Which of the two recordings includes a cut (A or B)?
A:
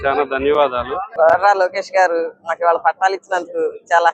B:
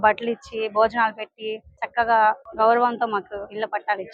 A